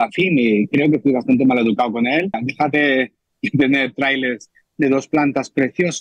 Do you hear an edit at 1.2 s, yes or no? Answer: no